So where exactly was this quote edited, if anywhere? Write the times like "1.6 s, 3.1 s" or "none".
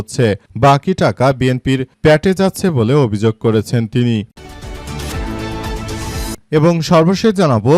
4.3 s, 6.4 s